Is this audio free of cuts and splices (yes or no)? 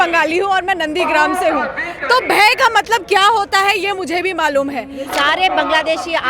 no